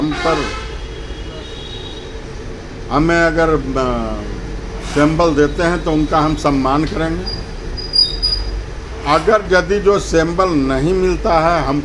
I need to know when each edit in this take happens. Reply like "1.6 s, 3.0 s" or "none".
none